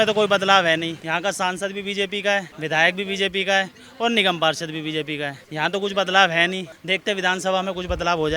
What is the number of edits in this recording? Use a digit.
4